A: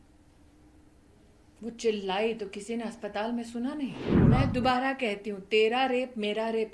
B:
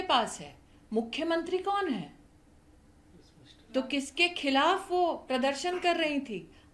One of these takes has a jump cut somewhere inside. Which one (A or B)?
A